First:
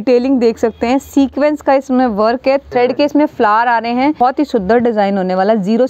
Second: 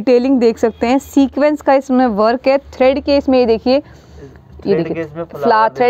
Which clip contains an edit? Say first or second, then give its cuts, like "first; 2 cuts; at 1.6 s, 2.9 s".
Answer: first; 2 cuts; at 2.7 s, 4.2 s